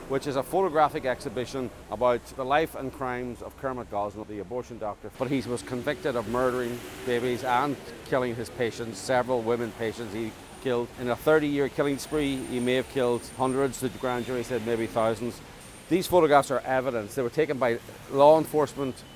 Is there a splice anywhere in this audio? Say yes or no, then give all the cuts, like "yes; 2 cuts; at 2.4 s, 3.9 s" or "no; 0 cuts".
yes; 1 cut; at 5.1 s